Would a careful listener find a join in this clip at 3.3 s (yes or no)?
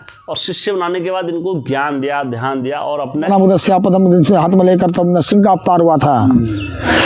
yes